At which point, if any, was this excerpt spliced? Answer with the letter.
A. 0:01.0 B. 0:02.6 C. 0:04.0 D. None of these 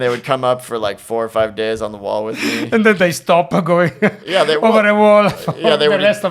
D